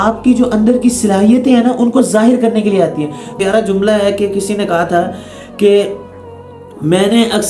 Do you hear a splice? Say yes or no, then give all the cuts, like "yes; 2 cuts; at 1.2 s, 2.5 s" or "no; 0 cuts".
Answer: yes; 1 cut; at 3.3 s